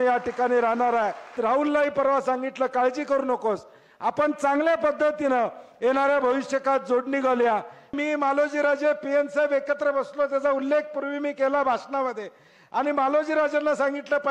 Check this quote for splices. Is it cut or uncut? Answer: cut